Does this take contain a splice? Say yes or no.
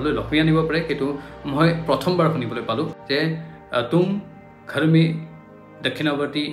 yes